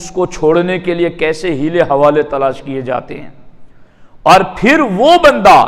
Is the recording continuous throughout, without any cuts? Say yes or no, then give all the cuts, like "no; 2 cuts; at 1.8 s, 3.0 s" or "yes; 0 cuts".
yes; 0 cuts